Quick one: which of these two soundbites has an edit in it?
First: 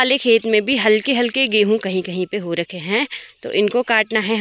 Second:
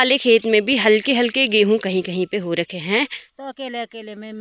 second; 1 cut; at 3.3 s

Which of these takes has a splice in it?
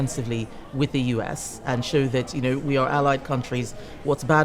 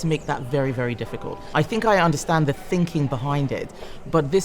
second; 1 cut; at 1.4 s

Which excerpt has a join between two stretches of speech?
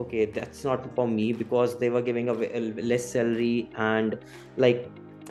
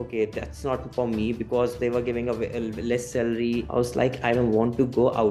second; 1 cut; at 3.6 s

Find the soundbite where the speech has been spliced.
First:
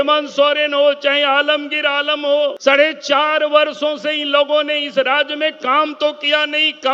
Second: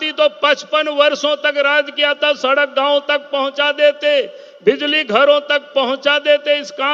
first; 1 cut; at 2.6 s

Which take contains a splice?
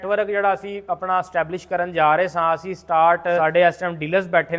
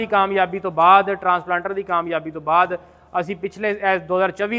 first; 1 cut; at 3.4 s

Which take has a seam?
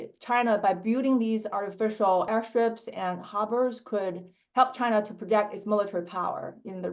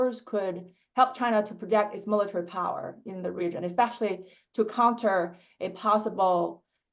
first; 1 cut; at 2.3 s

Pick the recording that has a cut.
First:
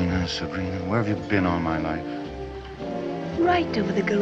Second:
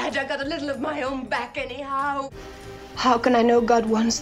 second; 1 cut; at 2.4 s

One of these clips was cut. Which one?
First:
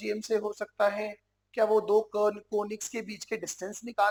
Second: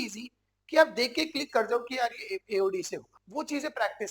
second; 1 cut; at 3.2 s

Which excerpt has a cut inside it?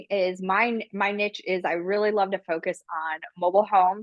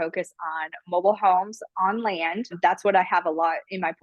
second; 1 cut; at 2.5 s

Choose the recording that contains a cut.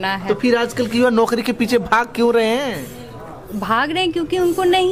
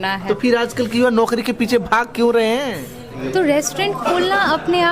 second; 1 cut; at 3.2 s

